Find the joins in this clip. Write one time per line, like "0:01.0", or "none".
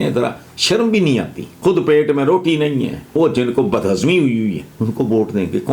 0:01.4
0:03.1
0:04.7